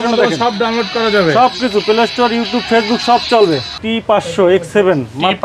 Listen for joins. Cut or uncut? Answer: cut